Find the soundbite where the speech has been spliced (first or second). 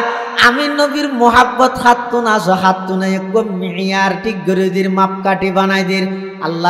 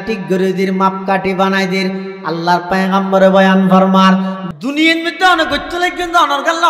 second